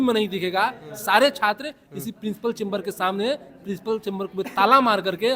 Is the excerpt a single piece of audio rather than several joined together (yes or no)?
yes